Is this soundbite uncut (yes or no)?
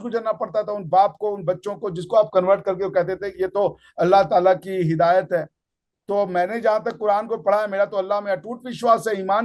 yes